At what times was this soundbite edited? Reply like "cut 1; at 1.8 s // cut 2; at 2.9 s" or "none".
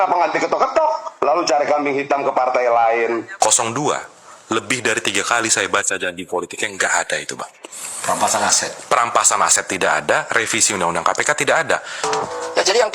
cut 1; at 3.3 s // cut 2; at 11.9 s